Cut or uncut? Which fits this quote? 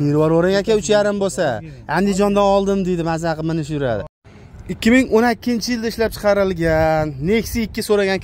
cut